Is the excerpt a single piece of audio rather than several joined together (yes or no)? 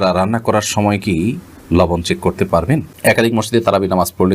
no